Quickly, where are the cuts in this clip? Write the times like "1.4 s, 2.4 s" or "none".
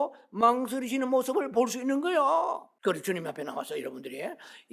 2.7 s